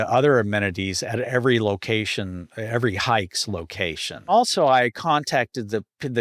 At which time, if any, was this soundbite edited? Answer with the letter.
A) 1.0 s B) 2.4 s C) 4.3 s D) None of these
C